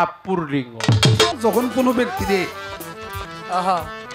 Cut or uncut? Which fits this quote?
cut